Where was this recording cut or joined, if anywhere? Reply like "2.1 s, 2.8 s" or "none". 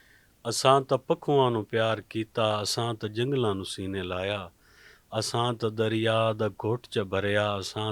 none